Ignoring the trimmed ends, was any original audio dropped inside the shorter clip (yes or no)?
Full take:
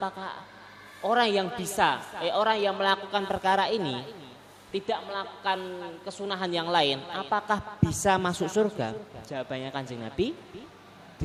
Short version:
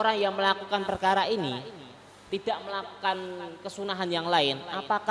no